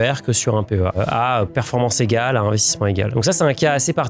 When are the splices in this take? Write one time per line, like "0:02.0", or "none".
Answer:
0:01.0
0:03.1